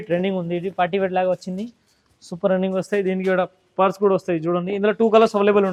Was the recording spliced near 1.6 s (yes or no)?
no